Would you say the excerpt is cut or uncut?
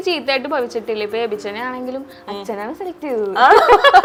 uncut